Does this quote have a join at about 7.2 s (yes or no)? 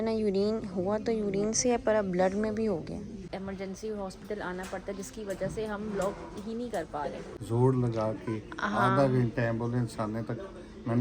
yes